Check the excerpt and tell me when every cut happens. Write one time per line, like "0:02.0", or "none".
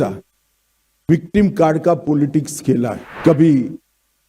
0:03.1